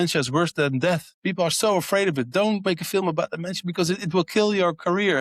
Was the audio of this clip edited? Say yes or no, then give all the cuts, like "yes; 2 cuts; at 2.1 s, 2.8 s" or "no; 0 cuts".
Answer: yes; 2 cuts; at 1.1 s, 2.7 s